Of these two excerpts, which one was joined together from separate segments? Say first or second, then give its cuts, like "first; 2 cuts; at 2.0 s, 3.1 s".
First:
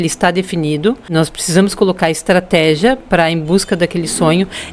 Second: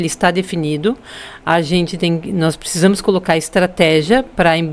first; 1 cut; at 1.0 s